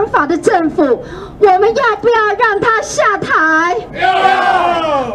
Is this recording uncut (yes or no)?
yes